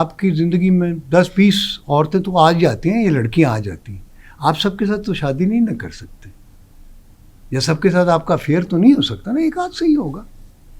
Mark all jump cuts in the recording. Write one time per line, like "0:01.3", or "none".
none